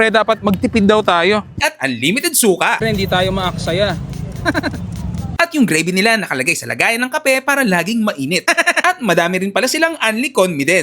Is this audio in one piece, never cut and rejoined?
no; 1 cut; at 1.5 s

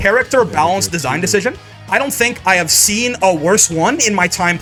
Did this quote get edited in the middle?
no; 0 cuts

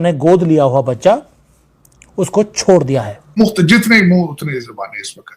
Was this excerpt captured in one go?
no; 1 cut; at 3.4 s

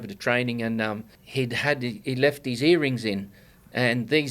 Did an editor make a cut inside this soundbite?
yes; 1 cut; at 1.1 s

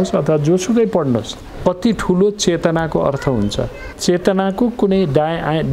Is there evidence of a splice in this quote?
yes; 2 cuts; at 1.4 s, 3.8 s

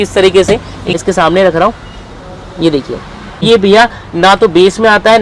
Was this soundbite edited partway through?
yes; 2 cuts; at 1.0 s, 3.4 s

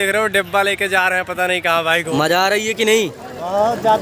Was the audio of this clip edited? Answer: yes; 1 cut; at 2.1 s

